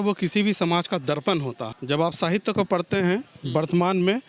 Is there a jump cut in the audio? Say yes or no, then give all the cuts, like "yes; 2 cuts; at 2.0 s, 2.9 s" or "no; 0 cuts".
yes; 1 cut; at 1.7 s